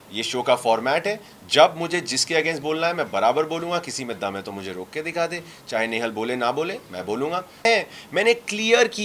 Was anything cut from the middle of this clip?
yes; 1 cut; at 7.6 s

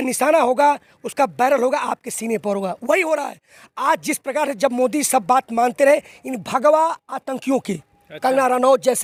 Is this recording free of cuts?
yes; 0 cuts

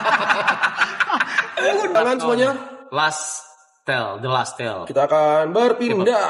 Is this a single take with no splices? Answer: no; 1 cut; at 1.9 s

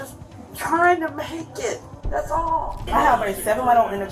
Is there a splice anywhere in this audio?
yes; 1 cut; at 2.9 s

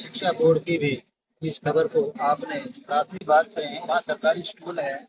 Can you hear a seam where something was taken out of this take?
yes; 1 cut; at 3.2 s

